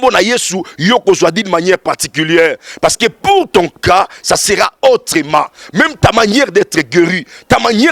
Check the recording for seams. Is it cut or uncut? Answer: uncut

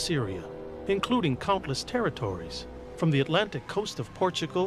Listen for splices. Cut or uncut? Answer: cut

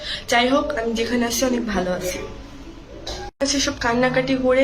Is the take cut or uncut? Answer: cut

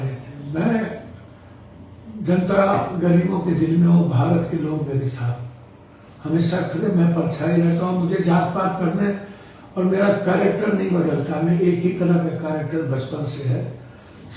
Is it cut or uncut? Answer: uncut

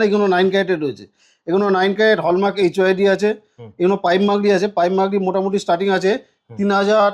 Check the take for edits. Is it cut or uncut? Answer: uncut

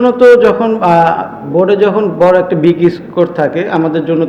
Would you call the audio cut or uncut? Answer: uncut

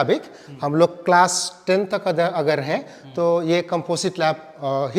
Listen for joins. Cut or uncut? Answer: uncut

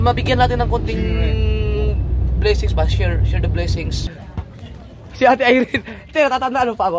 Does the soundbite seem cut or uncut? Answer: cut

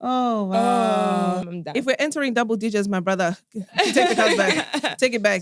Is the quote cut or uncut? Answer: cut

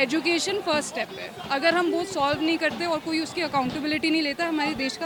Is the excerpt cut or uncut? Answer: uncut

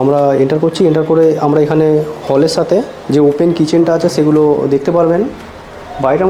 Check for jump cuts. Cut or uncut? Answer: uncut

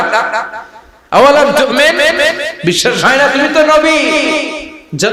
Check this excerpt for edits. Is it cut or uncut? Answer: uncut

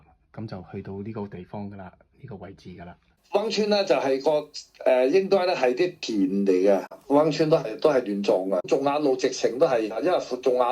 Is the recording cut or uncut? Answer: cut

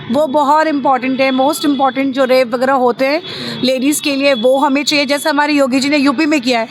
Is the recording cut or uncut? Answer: uncut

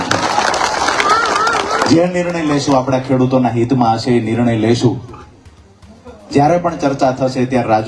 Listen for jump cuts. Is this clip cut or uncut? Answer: uncut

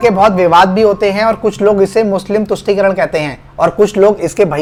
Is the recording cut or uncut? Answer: uncut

